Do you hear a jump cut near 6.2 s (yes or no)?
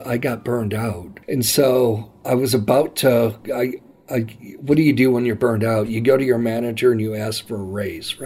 no